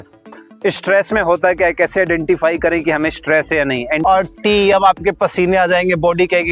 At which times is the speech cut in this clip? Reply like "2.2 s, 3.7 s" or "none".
4.0 s